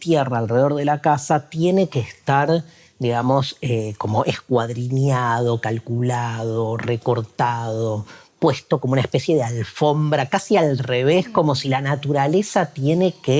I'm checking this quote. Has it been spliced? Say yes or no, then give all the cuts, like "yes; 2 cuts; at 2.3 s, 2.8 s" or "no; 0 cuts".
no; 0 cuts